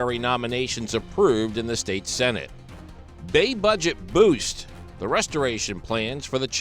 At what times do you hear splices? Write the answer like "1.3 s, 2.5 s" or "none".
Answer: none